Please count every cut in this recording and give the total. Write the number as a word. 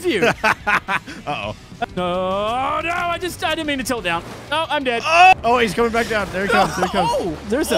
two